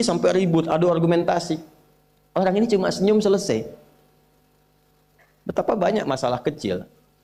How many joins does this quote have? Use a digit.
0